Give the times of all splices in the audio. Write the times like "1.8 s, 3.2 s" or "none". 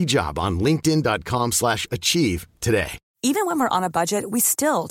3.0 s